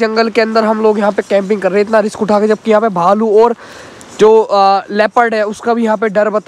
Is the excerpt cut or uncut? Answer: uncut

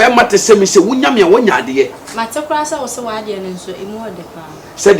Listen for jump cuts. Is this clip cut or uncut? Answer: uncut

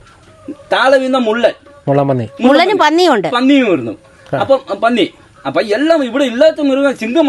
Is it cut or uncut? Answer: uncut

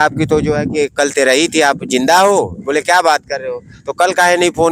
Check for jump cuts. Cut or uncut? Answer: uncut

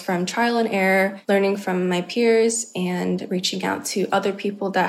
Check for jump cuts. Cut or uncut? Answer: cut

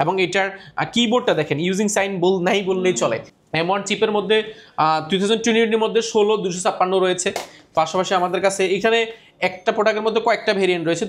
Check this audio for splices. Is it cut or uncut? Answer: cut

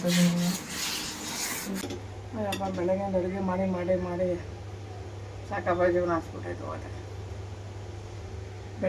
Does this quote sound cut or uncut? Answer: cut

